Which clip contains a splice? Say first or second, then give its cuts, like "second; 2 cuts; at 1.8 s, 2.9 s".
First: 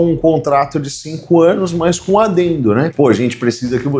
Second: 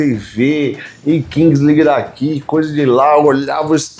first; 1 cut; at 2.9 s